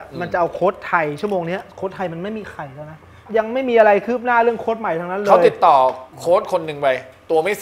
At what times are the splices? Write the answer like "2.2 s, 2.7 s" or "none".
3.2 s, 6.1 s